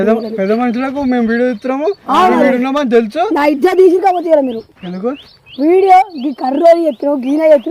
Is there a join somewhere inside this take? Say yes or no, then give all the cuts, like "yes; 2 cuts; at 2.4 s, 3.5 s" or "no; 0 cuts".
no; 0 cuts